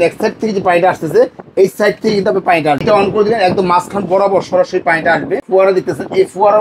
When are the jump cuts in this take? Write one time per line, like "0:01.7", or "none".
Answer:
0:02.8
0:05.4